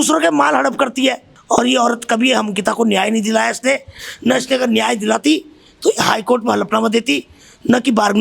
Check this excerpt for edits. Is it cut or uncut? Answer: cut